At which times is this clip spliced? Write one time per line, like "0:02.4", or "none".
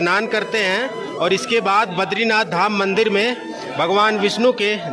none